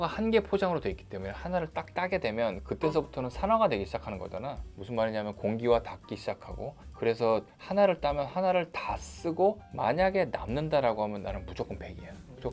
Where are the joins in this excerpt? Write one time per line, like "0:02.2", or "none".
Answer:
none